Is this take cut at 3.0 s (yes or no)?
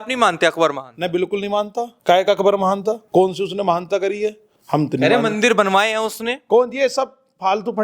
yes